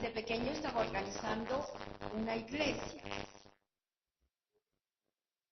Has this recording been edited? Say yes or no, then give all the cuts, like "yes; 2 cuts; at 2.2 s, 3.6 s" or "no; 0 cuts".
yes; 1 cut; at 1.5 s